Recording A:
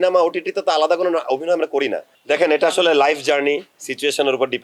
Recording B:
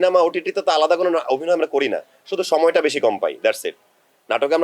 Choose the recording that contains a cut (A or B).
A